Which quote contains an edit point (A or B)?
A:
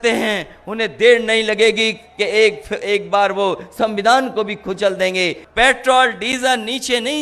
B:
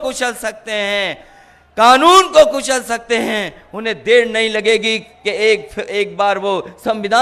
A